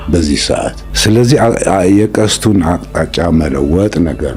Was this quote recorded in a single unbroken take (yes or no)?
yes